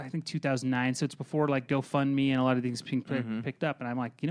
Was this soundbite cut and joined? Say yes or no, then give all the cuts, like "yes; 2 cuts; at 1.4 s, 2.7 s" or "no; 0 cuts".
no; 0 cuts